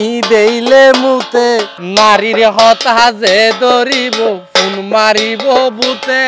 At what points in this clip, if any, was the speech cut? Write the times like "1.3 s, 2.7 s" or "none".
1.8 s